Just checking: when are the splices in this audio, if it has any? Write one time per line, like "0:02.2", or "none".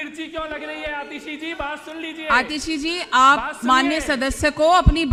none